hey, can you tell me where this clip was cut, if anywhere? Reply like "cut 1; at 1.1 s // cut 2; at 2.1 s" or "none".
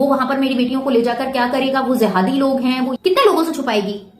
cut 1; at 2.9 s

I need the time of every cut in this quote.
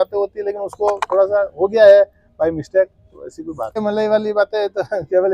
cut 1; at 3.8 s

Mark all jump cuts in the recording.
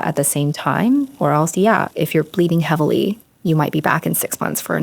cut 1; at 1.9 s

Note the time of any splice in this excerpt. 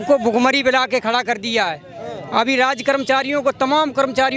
none

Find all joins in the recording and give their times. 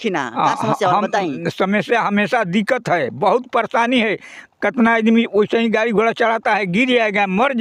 none

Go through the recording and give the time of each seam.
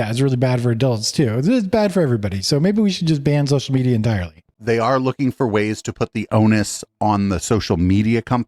cut 1; at 4.4 s

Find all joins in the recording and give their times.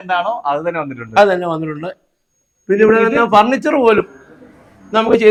none

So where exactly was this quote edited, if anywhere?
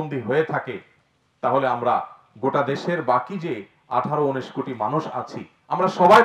none

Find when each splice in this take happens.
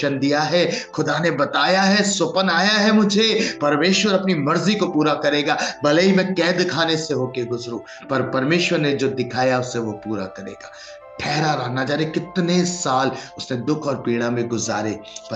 none

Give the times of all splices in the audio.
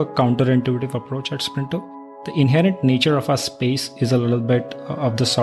cut 1; at 2.2 s

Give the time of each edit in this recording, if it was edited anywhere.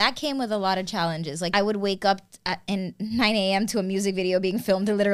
cut 1; at 1.5 s

